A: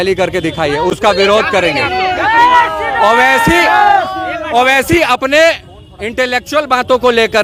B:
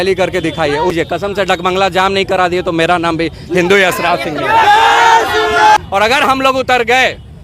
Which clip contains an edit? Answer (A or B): B